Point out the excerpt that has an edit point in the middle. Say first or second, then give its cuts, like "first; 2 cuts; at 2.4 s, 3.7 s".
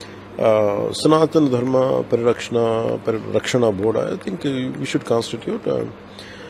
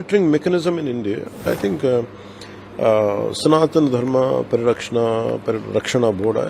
second; 1 cut; at 1.5 s